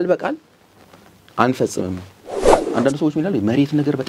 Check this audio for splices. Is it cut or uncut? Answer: cut